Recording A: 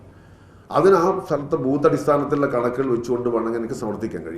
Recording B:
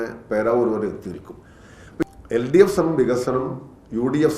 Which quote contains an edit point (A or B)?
B